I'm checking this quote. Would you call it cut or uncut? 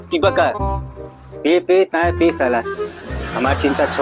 uncut